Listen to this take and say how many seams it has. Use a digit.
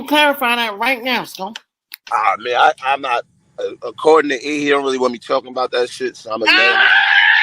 1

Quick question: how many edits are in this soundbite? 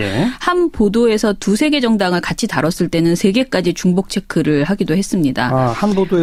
0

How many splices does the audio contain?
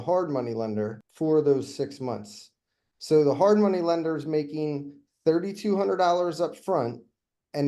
1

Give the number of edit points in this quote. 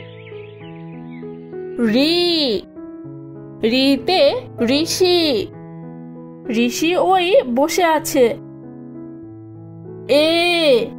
1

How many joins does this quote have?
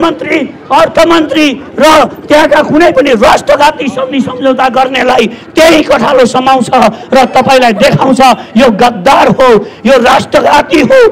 0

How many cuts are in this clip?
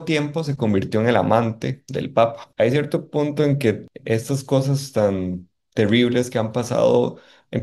2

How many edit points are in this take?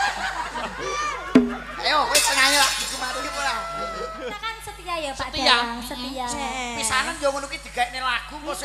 1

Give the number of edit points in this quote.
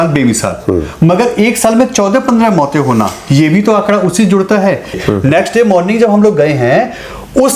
1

